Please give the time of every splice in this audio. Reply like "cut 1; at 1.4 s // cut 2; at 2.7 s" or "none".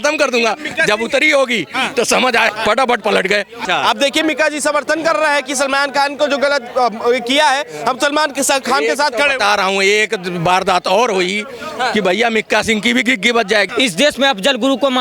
cut 1; at 3.6 s // cut 2; at 13.7 s